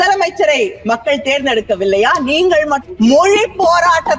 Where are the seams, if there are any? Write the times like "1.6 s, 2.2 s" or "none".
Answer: 2.8 s

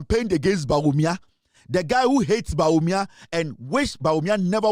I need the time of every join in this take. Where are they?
none

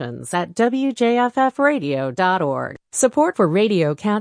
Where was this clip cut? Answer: 2.8 s

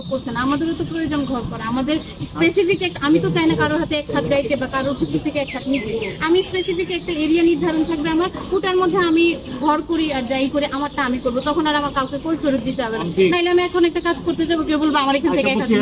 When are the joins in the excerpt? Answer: none

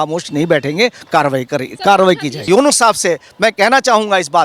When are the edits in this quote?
2.5 s

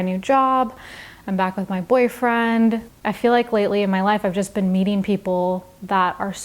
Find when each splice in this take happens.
2.9 s

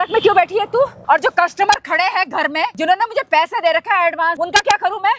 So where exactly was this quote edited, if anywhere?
1.0 s, 2.8 s, 4.4 s

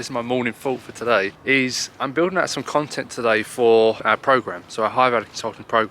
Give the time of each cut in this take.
1.4 s, 4.0 s

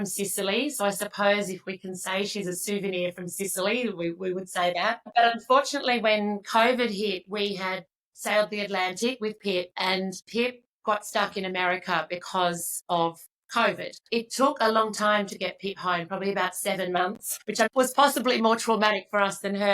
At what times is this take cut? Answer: 5.1 s, 10.2 s, 14.0 s, 17.4 s

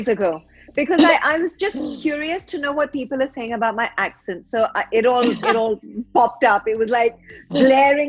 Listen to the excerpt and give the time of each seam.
none

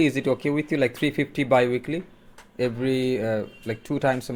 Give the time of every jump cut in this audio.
none

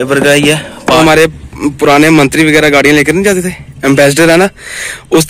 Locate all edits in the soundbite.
1.0 s

